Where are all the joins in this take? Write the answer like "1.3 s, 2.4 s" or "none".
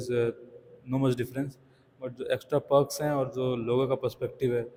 none